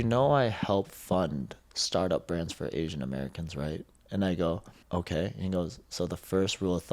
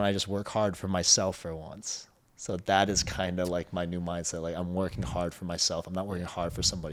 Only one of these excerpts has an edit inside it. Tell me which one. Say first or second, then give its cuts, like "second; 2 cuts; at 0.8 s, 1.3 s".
first; 1 cut; at 4.7 s